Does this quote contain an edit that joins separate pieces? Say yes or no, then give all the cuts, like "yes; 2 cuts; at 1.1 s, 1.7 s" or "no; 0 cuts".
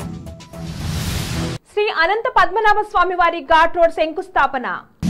no; 0 cuts